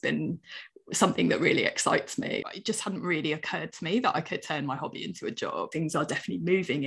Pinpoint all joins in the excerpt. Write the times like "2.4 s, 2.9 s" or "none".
2.4 s, 5.7 s